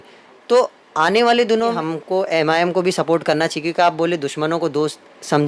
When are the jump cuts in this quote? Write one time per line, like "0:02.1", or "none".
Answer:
0:01.8